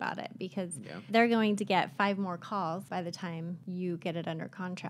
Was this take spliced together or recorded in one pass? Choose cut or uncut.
cut